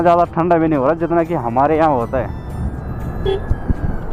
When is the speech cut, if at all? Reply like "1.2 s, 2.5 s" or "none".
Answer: none